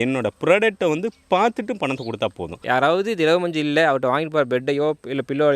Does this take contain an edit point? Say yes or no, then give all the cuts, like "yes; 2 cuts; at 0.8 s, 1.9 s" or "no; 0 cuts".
yes; 1 cut; at 2.6 s